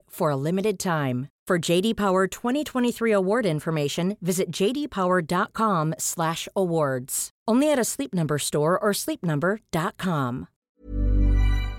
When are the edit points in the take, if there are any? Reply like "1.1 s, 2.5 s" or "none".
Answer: 10.5 s